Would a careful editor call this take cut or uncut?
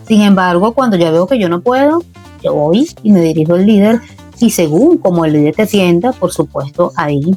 uncut